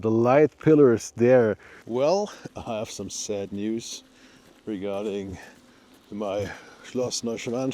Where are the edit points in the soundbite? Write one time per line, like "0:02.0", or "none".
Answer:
0:01.7